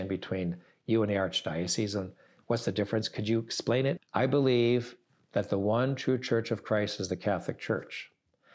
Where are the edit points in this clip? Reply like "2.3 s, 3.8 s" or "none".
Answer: 4.0 s